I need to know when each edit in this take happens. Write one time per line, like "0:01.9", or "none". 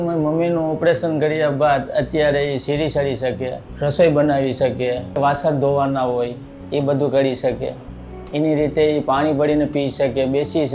0:03.7
0:05.2